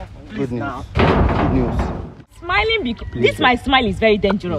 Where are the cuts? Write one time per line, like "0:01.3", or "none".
0:02.2